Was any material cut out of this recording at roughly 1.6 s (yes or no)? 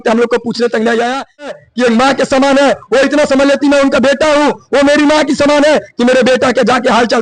yes